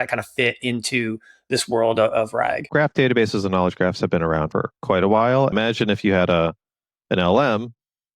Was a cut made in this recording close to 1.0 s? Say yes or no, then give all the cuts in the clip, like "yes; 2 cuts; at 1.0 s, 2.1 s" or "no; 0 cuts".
no; 3 cuts; at 2.6 s, 4.5 s, 5.5 s